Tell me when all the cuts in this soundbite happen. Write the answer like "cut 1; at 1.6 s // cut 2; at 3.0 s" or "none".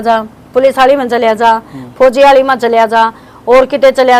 none